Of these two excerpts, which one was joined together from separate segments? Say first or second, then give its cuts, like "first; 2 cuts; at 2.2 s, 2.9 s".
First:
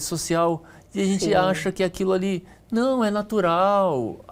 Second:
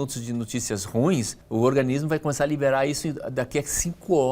second; 1 cut; at 1.4 s